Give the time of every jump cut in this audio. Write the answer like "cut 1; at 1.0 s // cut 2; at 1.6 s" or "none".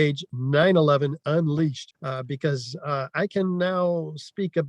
cut 1; at 1.9 s